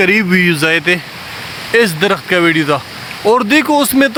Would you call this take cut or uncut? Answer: uncut